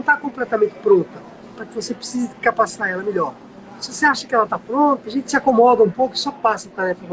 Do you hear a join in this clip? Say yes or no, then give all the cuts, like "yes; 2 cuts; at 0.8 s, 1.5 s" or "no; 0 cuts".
yes; 1 cut; at 5.0 s